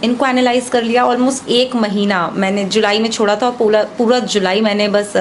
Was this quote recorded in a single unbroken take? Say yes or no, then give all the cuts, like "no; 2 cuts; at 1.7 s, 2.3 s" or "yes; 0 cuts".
yes; 0 cuts